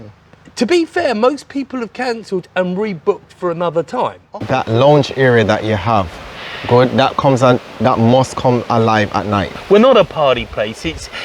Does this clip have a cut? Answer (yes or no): yes